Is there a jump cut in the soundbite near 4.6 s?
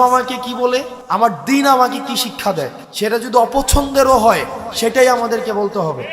no; 2 cuts; at 0.9 s, 2.8 s

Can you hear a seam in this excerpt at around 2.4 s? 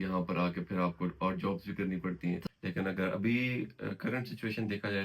yes; 1 cut; at 2.4 s

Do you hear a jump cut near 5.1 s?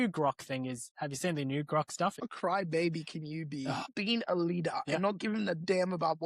no; 2 cuts; at 2.3 s, 3.9 s

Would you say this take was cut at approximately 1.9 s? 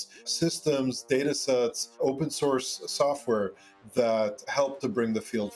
no; 0 cuts

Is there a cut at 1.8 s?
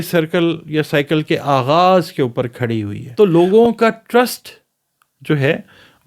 no; 1 cut; at 3.3 s

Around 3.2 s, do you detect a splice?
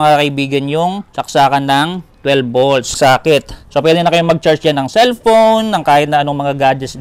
yes; 2 cuts; at 1.1 s, 3.2 s

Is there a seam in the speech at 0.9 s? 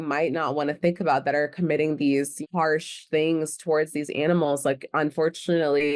no; 1 cut; at 2.3 s

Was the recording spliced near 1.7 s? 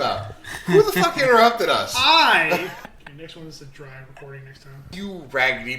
no; 2 cuts; at 2.9 s, 4.8 s

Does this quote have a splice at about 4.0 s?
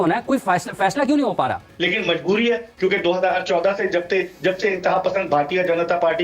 no; 1 cut; at 1.7 s

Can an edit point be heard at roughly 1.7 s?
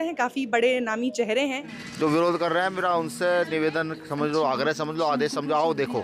yes; 1 cut; at 1.7 s

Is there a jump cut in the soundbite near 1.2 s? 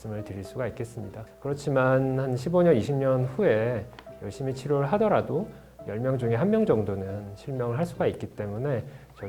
yes; 1 cut; at 1.2 s

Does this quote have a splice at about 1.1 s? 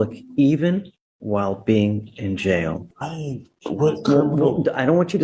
no; 1 cut; at 2.8 s

